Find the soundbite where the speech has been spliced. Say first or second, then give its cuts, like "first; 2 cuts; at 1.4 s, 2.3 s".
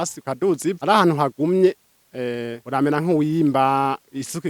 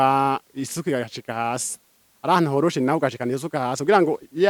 first; 2 cuts; at 0.8 s, 2.5 s